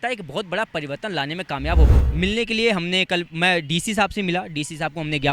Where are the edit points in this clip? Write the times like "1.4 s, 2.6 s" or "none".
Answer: 1.9 s